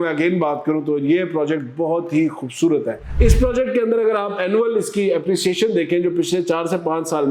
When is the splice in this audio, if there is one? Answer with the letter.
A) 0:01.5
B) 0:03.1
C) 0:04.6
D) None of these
B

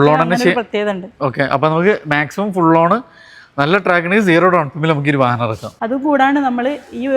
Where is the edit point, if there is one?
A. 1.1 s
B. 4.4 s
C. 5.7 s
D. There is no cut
C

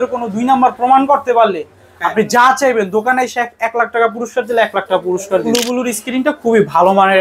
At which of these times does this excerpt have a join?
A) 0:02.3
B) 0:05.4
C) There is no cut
B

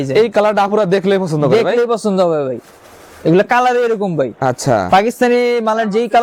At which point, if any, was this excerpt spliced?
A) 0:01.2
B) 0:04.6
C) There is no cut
C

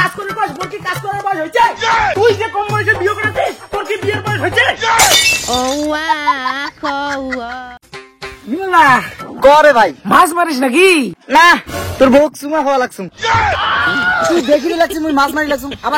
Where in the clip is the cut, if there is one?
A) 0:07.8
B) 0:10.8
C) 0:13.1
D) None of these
A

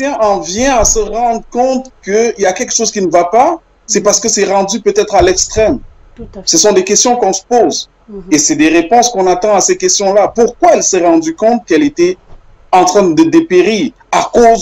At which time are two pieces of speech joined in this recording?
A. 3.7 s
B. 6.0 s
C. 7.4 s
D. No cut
D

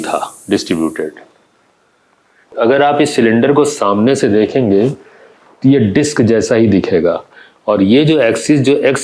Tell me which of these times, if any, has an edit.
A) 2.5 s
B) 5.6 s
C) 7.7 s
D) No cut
A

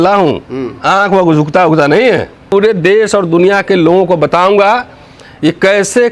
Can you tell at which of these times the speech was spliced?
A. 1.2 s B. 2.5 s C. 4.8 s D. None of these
B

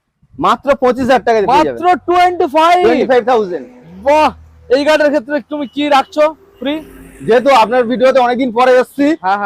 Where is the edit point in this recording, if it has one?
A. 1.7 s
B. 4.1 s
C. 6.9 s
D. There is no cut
D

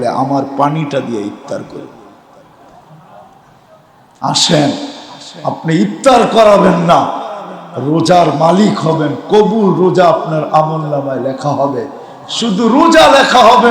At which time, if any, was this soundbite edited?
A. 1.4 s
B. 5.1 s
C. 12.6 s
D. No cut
D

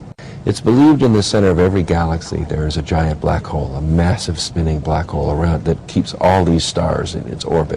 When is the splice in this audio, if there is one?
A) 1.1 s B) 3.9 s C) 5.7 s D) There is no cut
B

